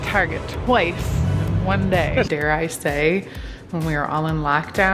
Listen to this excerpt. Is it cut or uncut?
cut